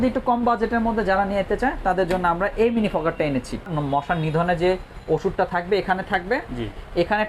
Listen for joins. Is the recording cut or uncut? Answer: cut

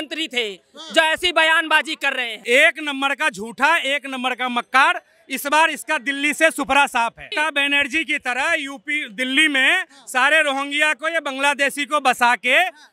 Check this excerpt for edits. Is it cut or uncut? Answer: cut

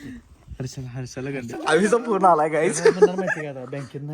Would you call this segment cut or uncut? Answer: cut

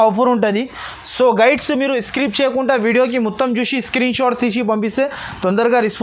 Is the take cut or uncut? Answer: uncut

